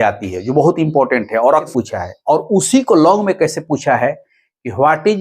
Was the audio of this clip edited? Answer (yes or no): yes